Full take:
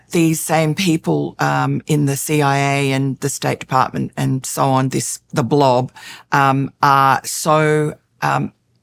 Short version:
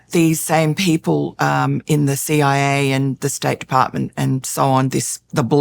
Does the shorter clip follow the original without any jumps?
yes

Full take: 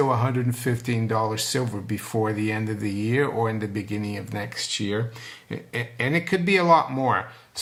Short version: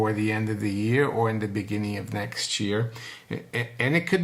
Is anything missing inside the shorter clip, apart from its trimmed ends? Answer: no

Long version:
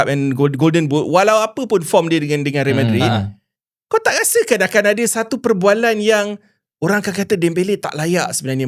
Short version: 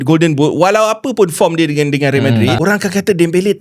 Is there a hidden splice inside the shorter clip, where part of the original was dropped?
yes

